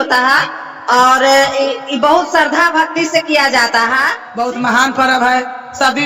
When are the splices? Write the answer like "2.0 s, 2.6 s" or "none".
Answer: 4.2 s